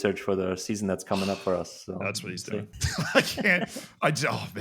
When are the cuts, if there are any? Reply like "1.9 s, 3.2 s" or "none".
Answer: 2.7 s

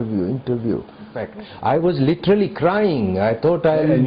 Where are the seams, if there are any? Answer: 1.2 s

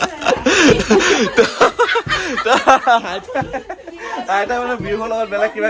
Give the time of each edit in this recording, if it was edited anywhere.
none

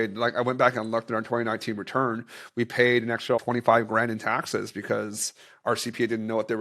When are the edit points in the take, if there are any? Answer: 3.4 s

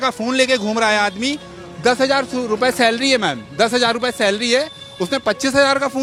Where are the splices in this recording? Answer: none

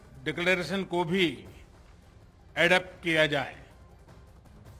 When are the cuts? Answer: 3.6 s

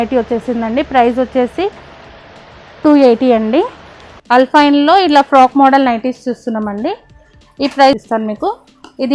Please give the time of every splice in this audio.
4.1 s, 8.0 s

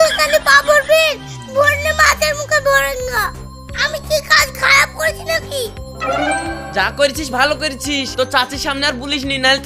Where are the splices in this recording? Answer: none

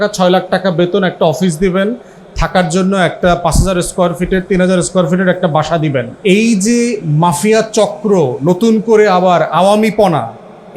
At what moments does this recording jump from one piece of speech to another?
6.1 s

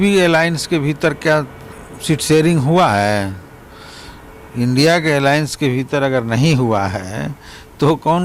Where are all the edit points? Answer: none

